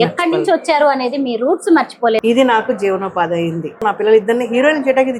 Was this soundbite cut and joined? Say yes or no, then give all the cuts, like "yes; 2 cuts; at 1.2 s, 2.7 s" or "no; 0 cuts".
yes; 2 cuts; at 2.2 s, 3.8 s